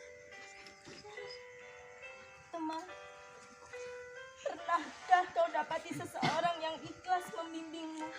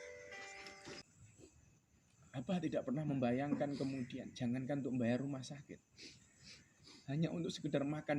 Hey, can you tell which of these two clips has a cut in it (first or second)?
second